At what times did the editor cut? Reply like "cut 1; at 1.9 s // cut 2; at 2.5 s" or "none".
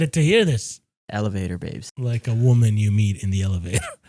cut 1; at 0.9 s // cut 2; at 1.8 s